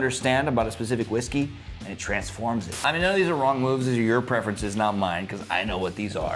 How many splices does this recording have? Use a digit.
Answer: 1